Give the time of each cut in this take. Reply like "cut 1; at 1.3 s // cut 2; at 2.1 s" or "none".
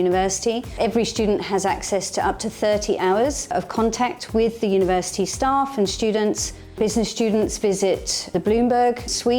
cut 1; at 6.7 s